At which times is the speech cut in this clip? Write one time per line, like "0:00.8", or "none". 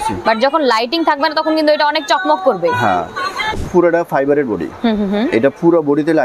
0:03.5